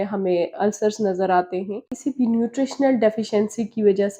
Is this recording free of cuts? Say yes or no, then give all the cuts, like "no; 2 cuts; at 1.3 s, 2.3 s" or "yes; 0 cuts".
no; 1 cut; at 1.8 s